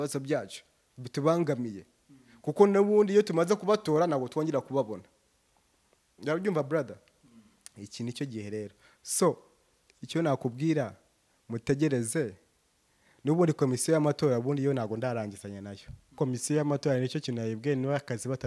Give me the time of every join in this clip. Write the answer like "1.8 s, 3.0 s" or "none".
16.1 s